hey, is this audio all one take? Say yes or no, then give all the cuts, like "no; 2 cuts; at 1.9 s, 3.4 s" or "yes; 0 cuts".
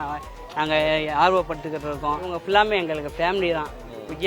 no; 1 cut; at 2.4 s